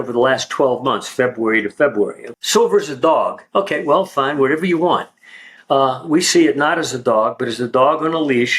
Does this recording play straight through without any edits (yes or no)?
no